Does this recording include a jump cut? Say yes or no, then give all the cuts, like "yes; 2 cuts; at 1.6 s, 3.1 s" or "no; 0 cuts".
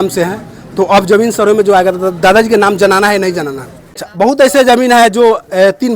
yes; 1 cut; at 4.0 s